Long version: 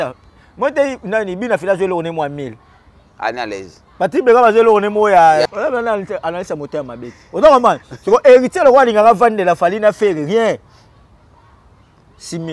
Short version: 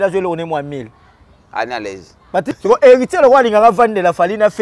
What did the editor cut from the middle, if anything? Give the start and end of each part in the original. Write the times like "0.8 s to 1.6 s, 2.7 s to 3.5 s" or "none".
4.1 s to 7.9 s